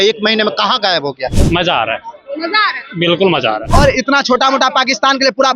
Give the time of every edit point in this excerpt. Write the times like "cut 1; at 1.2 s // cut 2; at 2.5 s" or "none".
cut 1; at 1.4 s // cut 2; at 3.6 s

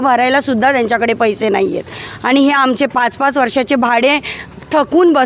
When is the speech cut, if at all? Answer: none

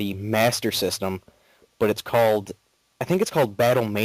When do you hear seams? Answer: cut 1; at 2.3 s

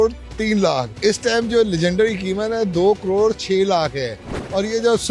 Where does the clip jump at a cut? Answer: cut 1; at 0.9 s

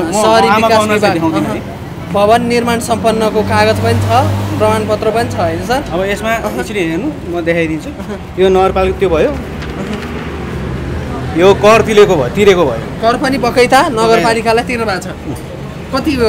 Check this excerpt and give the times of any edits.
none

